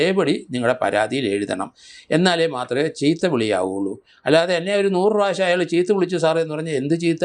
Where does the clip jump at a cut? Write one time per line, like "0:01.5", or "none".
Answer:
none